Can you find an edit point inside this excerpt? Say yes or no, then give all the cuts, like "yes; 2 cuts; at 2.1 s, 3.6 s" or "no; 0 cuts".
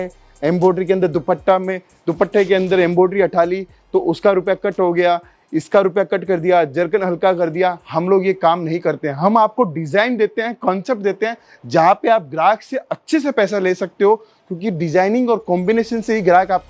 no; 0 cuts